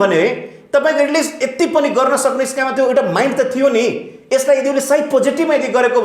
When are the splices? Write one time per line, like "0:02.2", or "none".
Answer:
none